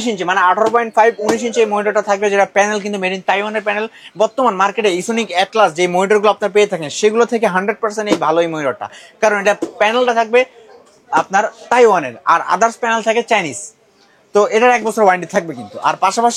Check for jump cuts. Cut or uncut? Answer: uncut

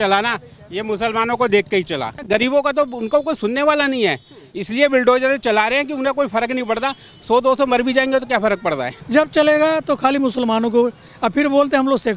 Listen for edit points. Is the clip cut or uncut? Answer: cut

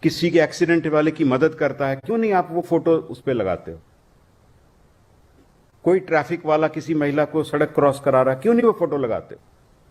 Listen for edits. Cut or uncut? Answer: uncut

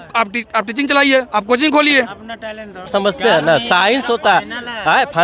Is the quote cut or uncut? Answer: cut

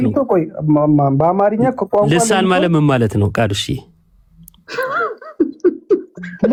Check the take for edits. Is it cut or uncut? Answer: uncut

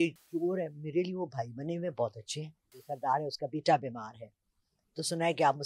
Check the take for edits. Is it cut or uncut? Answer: cut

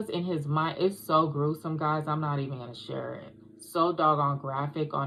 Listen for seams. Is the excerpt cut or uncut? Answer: uncut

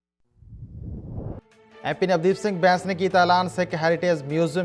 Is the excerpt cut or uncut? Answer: cut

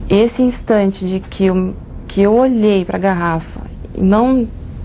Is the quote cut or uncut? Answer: uncut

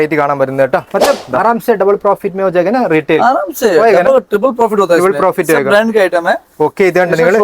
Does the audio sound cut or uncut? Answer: cut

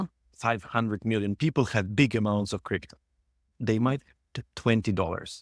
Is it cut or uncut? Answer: uncut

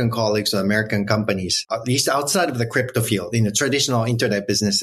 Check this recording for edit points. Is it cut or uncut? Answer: cut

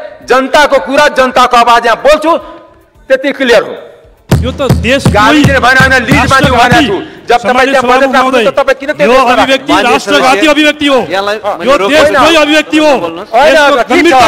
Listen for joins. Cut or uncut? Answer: cut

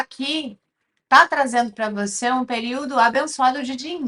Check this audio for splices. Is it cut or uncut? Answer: uncut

